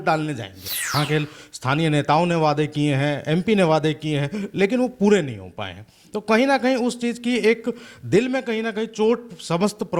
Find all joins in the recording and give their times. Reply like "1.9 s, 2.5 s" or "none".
0.9 s